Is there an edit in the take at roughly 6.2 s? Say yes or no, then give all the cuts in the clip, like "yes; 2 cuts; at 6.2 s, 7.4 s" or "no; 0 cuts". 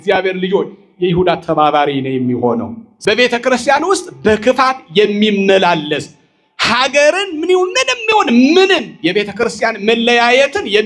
no; 1 cut; at 2.8 s